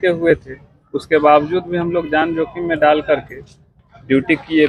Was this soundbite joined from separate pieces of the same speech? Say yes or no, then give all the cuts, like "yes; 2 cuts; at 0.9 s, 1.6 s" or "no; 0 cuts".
no; 0 cuts